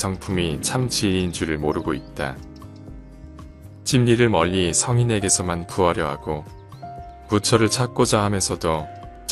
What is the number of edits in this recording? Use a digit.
0